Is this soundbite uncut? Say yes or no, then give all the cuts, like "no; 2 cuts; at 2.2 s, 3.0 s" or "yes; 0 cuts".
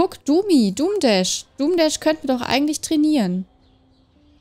yes; 0 cuts